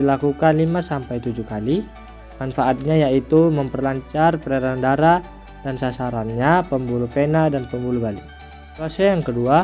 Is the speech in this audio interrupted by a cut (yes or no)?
yes